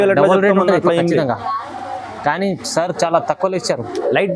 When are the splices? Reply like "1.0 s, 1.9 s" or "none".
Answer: none